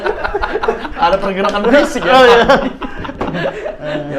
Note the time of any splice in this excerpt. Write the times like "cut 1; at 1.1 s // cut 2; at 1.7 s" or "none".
none